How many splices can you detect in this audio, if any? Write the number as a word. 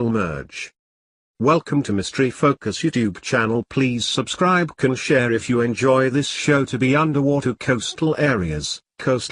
zero